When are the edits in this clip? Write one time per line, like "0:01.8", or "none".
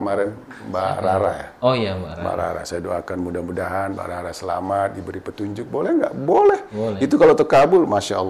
none